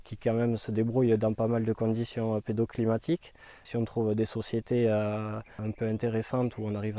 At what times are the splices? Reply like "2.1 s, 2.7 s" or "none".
3.7 s, 5.6 s